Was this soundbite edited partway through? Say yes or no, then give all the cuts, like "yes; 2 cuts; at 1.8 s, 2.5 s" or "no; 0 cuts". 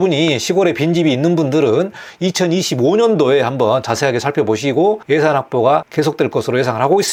no; 0 cuts